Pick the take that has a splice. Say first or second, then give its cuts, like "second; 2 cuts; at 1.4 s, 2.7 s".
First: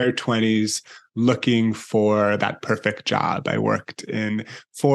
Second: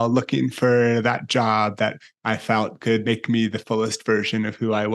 second; 1 cut; at 3.1 s